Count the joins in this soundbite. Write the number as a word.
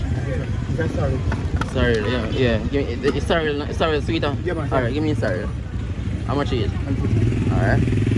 zero